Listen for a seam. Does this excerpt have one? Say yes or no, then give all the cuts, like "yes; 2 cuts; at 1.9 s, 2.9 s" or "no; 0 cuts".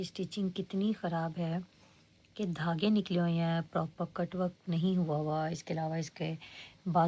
no; 0 cuts